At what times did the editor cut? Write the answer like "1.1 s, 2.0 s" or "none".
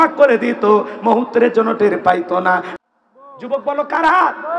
2.7 s